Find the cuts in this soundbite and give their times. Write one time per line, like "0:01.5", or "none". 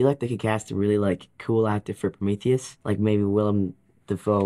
0:02.7

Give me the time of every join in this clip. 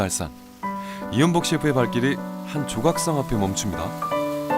none

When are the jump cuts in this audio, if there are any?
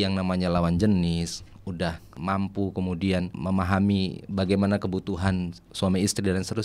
0:02.1
0:03.3

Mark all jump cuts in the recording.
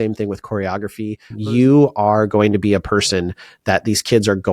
0:01.3

